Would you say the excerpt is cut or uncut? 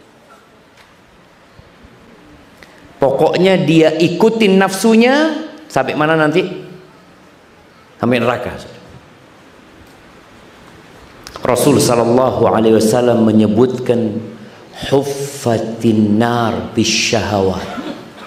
uncut